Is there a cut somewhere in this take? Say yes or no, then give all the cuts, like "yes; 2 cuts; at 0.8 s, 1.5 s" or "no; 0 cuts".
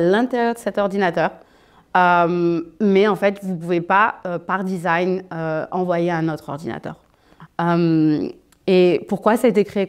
no; 0 cuts